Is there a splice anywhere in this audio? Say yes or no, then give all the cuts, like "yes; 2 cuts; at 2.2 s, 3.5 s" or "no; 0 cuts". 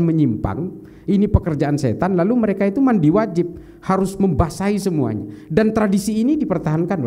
no; 0 cuts